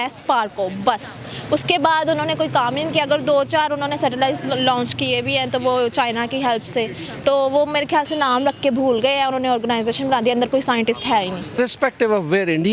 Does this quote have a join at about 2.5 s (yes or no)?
no